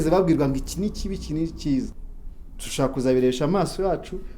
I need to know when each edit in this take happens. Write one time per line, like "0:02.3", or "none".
0:02.0